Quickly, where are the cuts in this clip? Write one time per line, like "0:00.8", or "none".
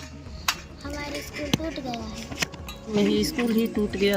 0:02.9